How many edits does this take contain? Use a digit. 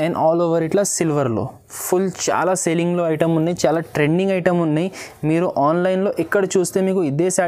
0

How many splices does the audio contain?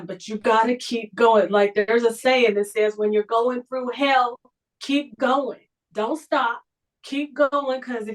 0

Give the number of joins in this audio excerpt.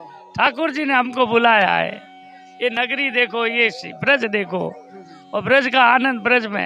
0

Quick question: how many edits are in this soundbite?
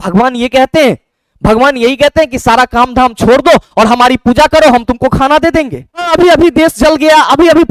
1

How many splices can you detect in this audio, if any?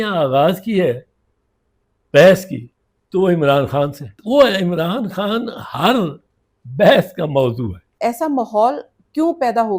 2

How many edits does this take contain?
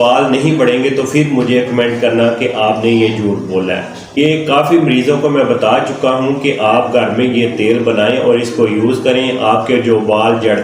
1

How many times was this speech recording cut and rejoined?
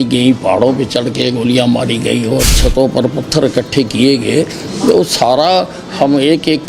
1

